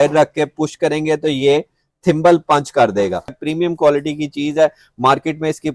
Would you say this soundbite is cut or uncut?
cut